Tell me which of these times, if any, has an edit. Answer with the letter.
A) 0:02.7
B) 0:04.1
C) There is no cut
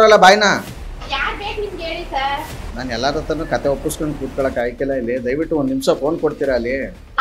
A